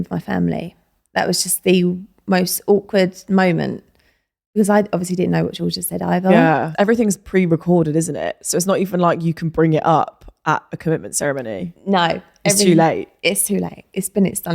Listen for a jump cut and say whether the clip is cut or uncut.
cut